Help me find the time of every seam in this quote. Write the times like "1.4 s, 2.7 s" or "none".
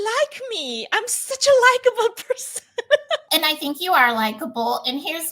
3.3 s